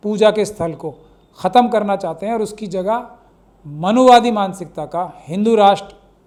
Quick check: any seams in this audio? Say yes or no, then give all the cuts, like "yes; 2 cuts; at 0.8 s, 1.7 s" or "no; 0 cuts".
no; 0 cuts